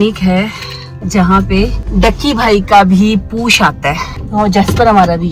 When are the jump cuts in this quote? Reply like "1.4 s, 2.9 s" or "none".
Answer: 1.0 s, 1.8 s, 4.1 s